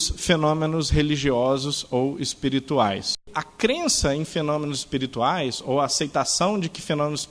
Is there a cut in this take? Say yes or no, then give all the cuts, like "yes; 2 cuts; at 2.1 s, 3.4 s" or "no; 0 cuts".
yes; 1 cut; at 3.4 s